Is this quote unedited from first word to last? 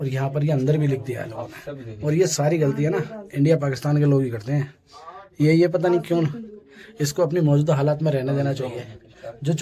yes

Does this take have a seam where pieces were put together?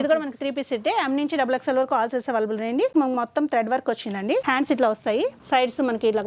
yes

